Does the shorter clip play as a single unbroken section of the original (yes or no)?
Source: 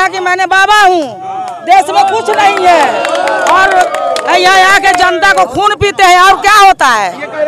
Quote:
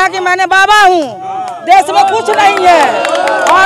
yes